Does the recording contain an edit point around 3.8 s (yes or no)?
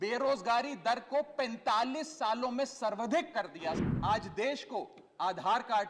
yes